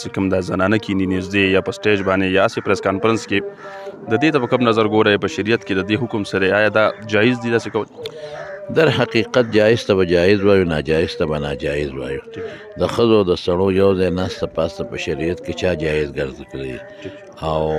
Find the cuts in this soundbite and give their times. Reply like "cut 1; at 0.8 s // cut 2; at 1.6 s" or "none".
none